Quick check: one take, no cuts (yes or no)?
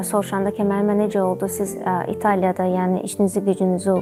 yes